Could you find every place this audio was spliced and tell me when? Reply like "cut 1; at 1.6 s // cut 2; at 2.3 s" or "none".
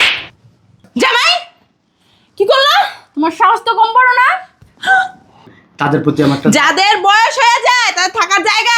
cut 1; at 5.6 s